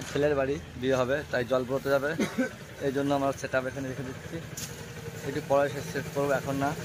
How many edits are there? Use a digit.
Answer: 0